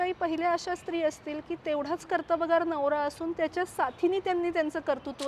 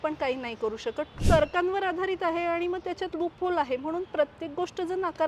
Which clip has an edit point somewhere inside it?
second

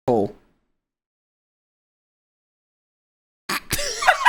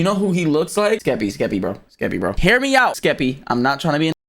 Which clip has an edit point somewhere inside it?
second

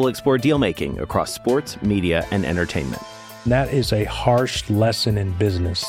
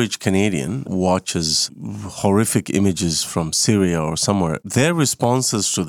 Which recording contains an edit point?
second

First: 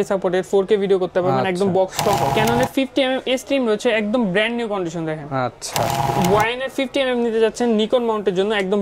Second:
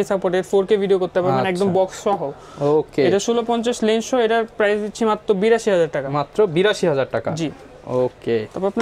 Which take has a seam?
first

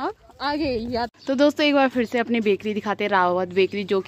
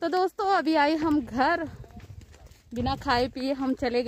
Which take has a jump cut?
first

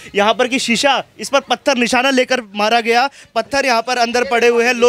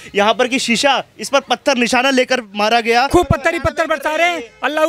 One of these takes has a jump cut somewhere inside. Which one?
second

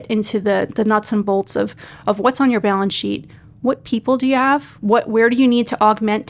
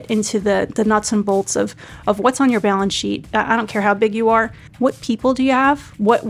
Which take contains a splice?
second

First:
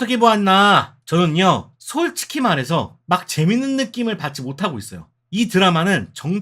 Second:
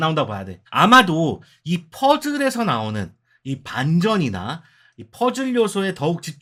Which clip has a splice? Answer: first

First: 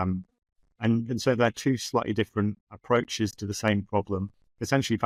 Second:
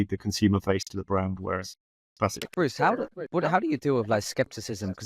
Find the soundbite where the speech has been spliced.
second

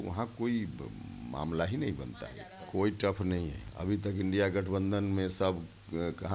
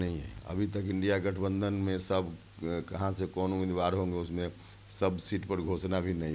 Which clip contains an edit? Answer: first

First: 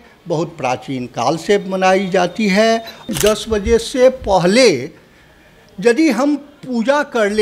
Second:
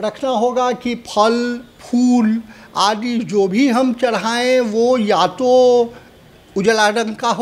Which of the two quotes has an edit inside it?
first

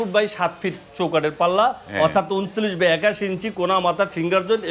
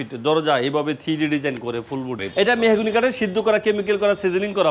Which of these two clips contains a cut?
second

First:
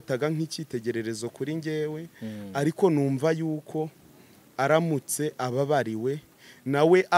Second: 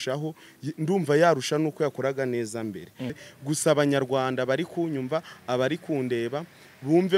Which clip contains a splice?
second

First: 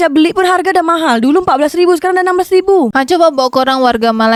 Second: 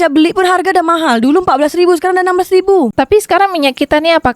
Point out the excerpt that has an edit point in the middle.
second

